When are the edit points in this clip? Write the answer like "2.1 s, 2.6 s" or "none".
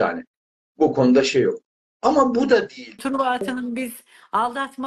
3.0 s